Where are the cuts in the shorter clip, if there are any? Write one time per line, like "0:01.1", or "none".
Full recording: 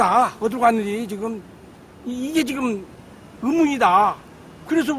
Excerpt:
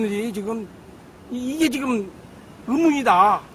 none